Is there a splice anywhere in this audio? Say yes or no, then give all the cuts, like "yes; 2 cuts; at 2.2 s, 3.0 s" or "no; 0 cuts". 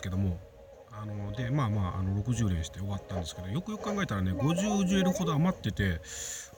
no; 0 cuts